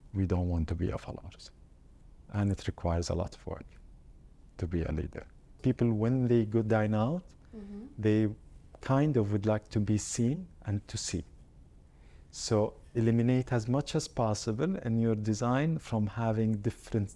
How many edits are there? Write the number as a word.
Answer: one